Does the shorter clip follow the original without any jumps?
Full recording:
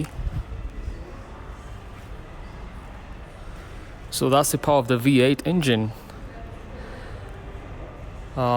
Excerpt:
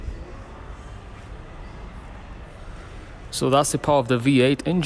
yes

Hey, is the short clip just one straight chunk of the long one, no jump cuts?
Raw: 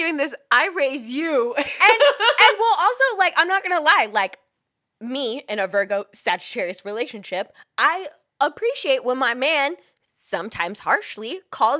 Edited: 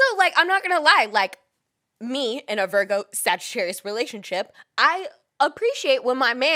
yes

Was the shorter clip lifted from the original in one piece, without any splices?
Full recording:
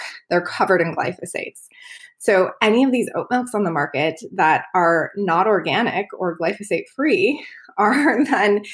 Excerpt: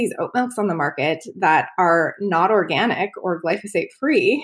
yes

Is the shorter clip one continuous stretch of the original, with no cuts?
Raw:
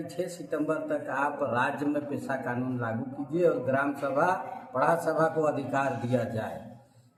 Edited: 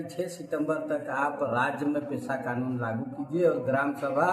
yes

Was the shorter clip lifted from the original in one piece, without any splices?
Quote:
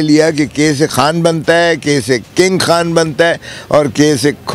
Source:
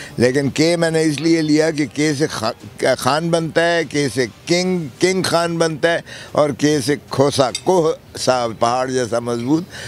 no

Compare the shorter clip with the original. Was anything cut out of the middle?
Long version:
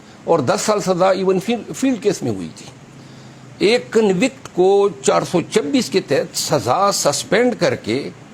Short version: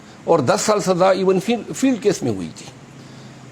no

